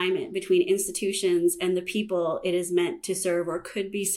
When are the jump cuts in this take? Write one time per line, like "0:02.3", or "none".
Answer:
none